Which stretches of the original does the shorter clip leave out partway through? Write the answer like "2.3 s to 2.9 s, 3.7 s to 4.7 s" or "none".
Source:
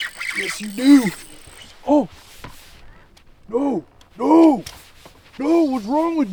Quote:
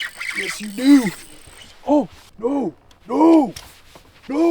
2.2 s to 3.3 s

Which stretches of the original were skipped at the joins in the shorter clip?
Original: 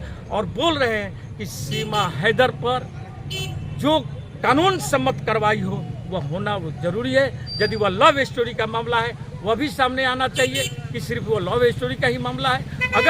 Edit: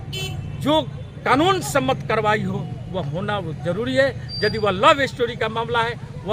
none

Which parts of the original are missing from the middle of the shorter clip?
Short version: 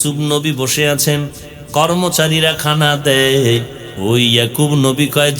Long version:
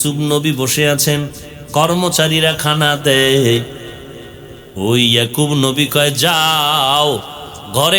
3.8 s to 4.6 s

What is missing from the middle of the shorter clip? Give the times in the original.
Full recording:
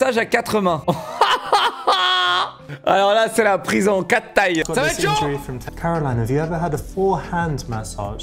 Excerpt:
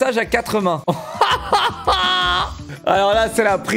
none

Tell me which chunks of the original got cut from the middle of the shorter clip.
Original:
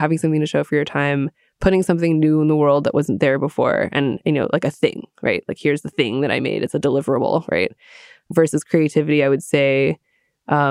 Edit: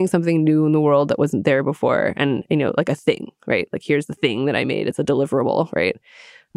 none

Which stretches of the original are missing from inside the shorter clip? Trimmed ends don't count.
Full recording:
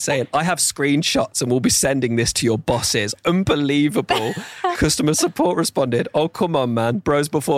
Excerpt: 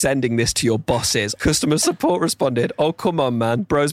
3.3 s to 4.9 s

